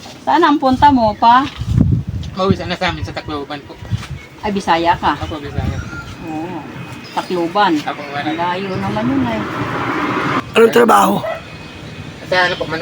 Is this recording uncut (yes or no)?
no